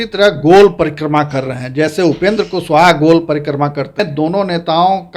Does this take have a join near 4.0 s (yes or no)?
yes